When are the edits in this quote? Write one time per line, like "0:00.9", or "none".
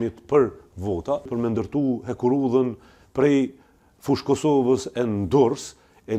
0:01.3